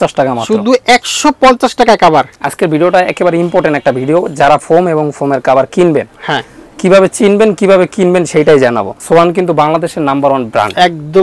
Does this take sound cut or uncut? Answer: cut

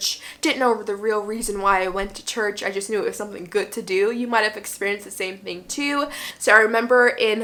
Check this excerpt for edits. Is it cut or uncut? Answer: uncut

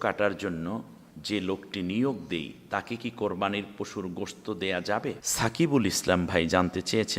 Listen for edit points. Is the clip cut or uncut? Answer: cut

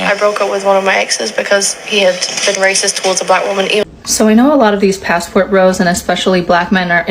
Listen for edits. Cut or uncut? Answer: cut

